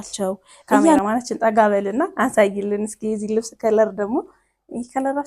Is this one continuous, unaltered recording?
no; 1 cut; at 1.0 s

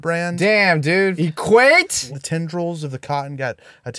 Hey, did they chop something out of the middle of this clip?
yes; 2 cuts; at 1.2 s, 2.2 s

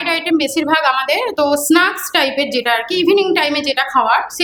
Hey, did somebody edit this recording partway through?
no; 0 cuts

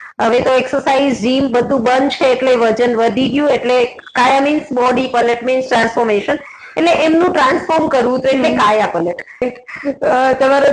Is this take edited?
yes; 1 cut; at 9.4 s

